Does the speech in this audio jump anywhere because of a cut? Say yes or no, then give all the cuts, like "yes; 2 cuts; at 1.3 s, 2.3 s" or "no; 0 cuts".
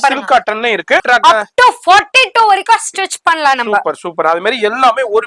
yes; 1 cut; at 1.0 s